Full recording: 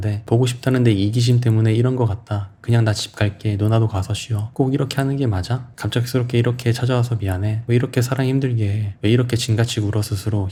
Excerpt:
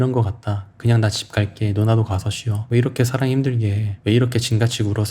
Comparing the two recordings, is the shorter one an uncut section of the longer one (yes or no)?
no